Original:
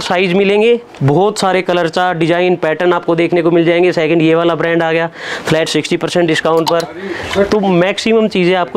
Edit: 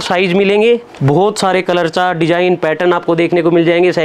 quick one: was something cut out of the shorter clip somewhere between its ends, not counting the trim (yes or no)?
no